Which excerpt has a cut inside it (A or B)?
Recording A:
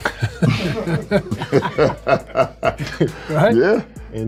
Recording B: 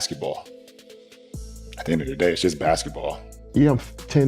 B